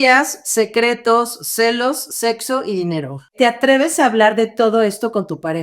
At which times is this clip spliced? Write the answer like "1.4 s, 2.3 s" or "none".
3.3 s